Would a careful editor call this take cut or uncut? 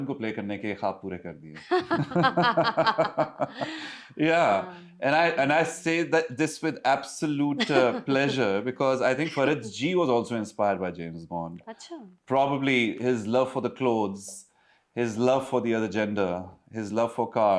uncut